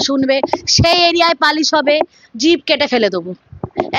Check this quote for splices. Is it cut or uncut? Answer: uncut